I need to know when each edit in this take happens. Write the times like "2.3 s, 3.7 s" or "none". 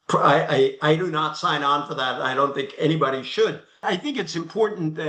3.8 s